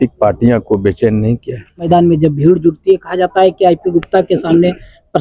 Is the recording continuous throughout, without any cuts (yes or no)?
no